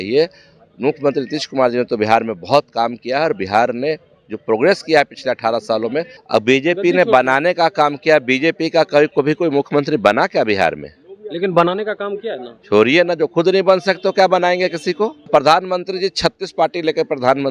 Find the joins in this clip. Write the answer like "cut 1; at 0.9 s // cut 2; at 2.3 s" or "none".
cut 1; at 6.2 s // cut 2; at 15.2 s